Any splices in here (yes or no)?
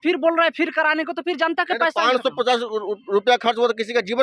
no